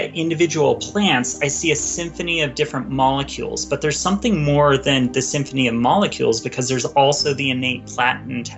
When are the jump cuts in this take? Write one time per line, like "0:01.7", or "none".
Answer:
none